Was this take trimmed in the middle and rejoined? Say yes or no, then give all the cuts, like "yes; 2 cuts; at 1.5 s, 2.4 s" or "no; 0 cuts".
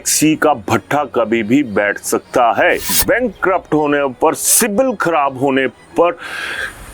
yes; 1 cut; at 2.9 s